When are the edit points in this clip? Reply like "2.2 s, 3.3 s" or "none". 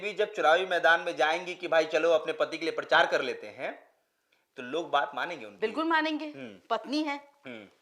none

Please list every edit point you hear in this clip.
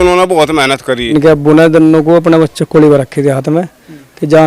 1.1 s

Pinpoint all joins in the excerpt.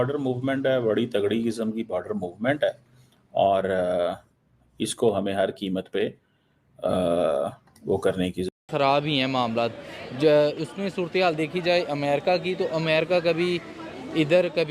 8.5 s

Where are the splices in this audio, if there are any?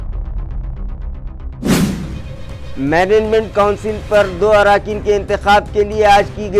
1.9 s

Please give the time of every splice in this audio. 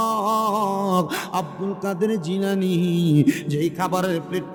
none

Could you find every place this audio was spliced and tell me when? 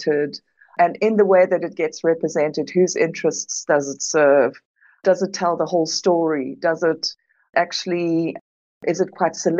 none

